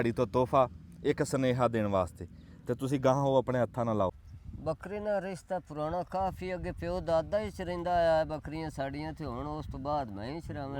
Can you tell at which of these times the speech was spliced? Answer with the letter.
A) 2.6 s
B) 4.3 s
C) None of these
B